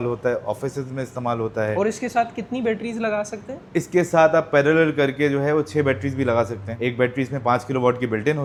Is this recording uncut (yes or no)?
yes